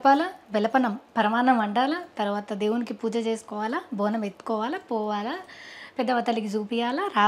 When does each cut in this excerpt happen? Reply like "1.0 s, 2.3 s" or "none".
none